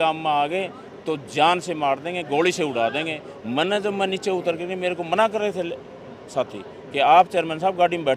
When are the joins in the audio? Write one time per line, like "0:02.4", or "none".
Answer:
none